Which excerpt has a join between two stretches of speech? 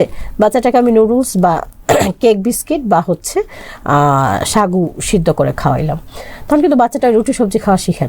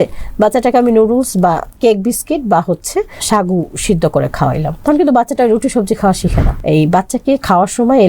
second; 4 cuts; at 1.7 s, 3.2 s, 4.7 s, 6.5 s

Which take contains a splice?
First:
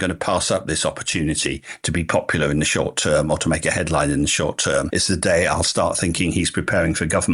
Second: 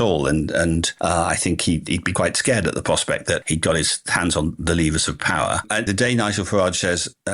second; 2 cuts; at 2.1 s, 5.7 s

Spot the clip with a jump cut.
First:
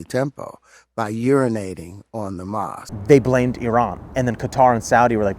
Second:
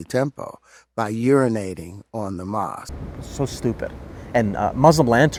first; 2 cuts; at 2.9 s, 4.0 s

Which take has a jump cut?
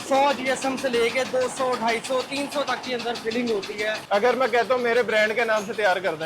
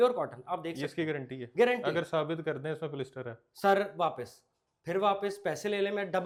first; 1 cut; at 4.0 s

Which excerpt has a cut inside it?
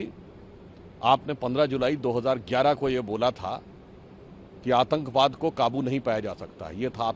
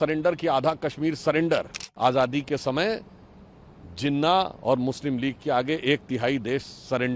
second; 1 cut; at 1.9 s

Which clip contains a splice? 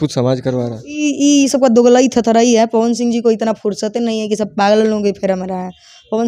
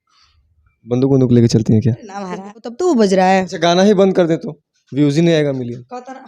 second; 1 cut; at 2.6 s

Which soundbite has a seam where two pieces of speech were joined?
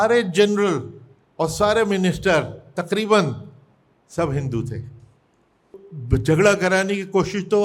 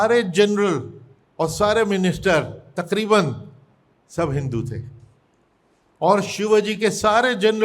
first; 1 cut; at 5.8 s

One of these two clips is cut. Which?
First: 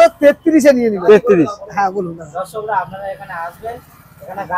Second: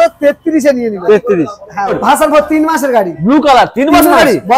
second; 1 cut; at 1.9 s

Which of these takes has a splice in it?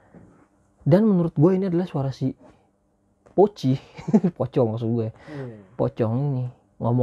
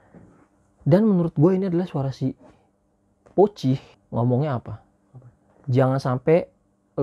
second; 1 cut; at 3.9 s

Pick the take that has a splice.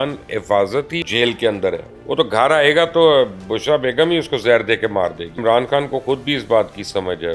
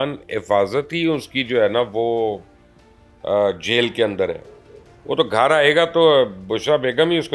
first; 3 cuts; at 1.0 s, 1.9 s, 5.4 s

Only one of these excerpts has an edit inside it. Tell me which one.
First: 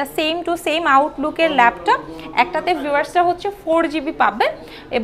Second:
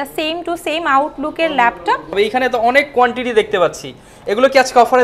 second; 1 cut; at 2.1 s

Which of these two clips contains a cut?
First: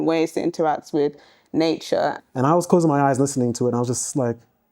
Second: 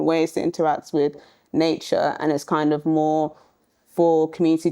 first; 1 cut; at 2.2 s

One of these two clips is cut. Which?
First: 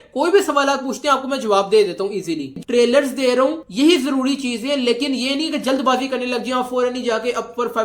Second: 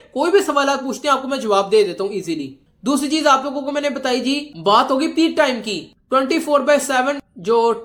first; 1 cut; at 2.6 s

